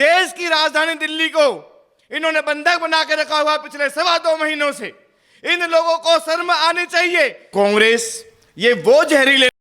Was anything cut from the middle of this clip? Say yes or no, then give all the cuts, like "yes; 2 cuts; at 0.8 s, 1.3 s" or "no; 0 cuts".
yes; 1 cut; at 7.5 s